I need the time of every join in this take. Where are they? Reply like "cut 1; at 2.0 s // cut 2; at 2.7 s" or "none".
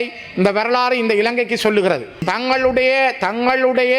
cut 1; at 2.3 s